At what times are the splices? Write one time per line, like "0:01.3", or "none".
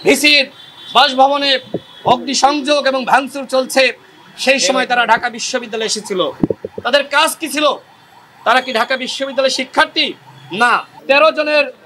0:10.9

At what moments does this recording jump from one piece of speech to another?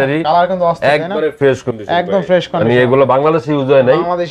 none

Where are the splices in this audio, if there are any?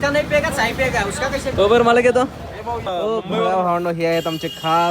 0:01.6
0:02.8

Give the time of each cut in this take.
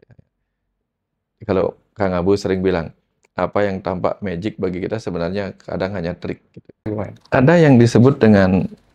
0:06.8

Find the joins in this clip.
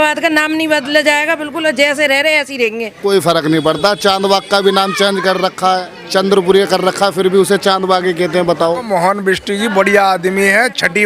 0:03.0
0:08.9

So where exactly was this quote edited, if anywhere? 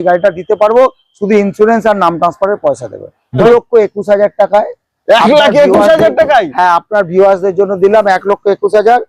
0:03.4

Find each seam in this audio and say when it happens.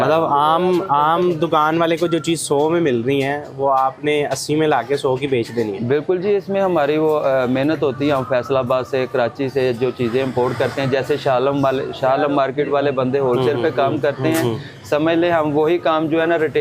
none

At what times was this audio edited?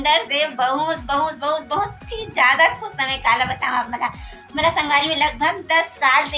none

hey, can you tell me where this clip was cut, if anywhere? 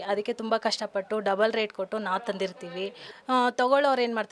0:03.1

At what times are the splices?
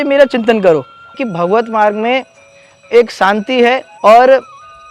0:01.2
0:03.9

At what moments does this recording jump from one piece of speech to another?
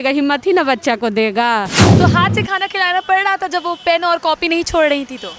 0:01.8

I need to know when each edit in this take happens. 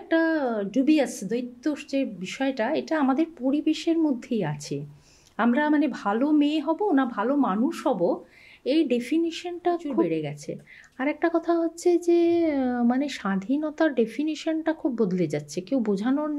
0:10.1

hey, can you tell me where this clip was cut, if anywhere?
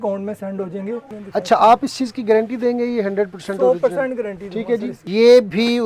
0:01.1
0:05.0

